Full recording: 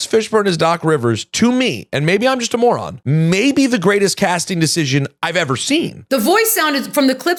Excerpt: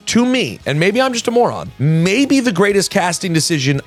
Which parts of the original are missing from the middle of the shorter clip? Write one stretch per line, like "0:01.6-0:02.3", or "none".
none